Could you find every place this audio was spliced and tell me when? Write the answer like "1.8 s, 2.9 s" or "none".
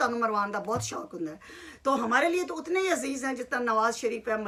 none